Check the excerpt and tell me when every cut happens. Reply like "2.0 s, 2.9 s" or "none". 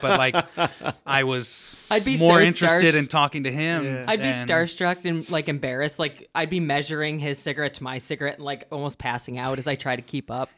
none

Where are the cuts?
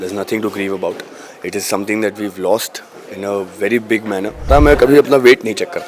4.5 s

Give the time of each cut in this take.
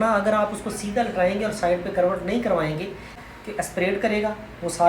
3.2 s

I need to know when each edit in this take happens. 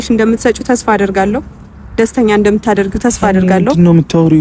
none

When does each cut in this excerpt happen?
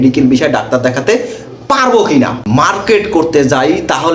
2.4 s

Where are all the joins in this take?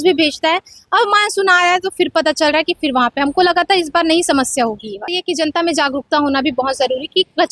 5.2 s

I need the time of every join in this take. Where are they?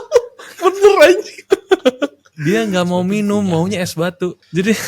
2.3 s

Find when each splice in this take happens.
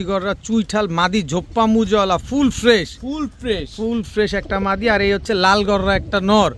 none

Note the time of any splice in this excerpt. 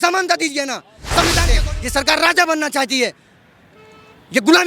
1.5 s

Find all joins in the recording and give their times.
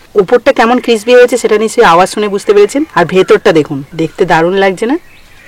3.9 s

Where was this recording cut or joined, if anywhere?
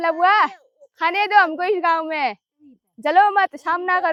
none

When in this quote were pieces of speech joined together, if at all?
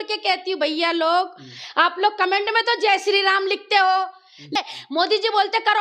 4.6 s

